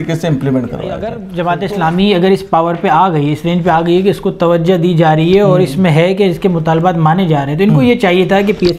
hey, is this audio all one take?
no; 1 cut; at 1.3 s

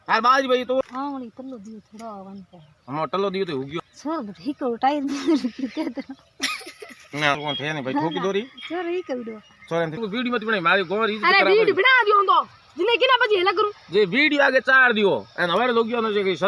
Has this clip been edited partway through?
yes; 2 cuts; at 0.8 s, 9.9 s

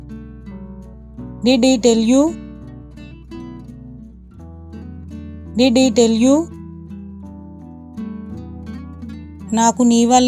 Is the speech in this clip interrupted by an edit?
no; 0 cuts

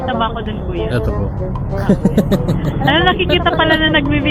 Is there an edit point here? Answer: no; 0 cuts

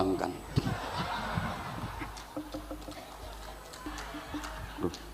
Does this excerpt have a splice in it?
yes; 1 cut; at 3.9 s

